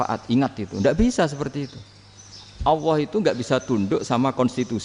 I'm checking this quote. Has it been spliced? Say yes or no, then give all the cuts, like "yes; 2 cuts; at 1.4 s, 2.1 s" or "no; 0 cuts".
no; 0 cuts